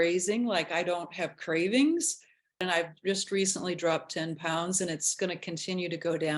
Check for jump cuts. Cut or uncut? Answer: cut